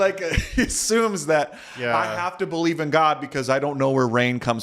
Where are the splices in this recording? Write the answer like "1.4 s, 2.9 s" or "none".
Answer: none